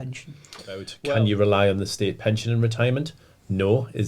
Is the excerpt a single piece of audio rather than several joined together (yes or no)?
no